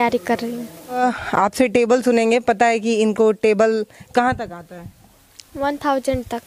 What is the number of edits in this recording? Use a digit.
1